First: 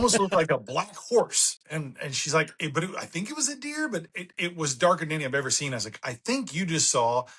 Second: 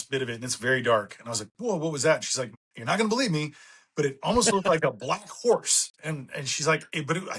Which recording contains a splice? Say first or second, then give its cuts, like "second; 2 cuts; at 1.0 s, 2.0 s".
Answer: second; 1 cut; at 2.7 s